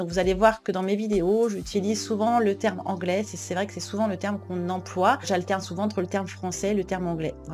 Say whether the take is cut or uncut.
uncut